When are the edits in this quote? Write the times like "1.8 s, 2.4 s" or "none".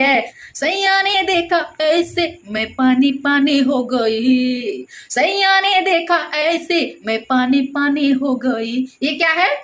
none